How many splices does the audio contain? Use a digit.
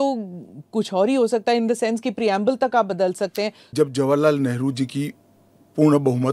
1